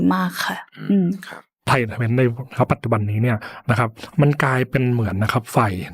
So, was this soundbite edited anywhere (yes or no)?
yes